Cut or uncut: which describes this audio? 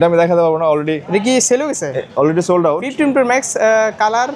uncut